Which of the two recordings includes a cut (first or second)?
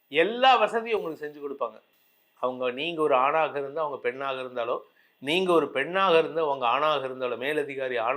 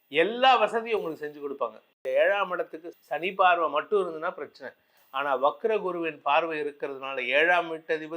second